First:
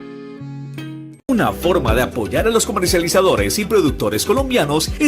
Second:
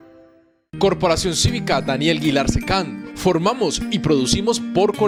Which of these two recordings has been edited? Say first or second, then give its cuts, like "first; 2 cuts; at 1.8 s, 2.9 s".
first; 1 cut; at 1.1 s